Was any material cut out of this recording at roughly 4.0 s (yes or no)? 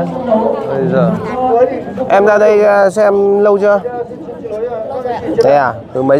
no